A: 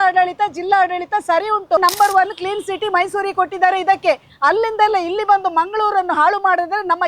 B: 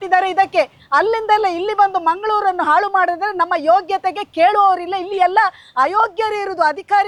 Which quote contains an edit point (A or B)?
A